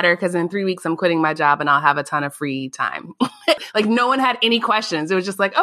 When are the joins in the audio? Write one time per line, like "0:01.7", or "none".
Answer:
0:03.6